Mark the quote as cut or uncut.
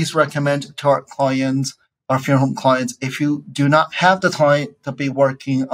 uncut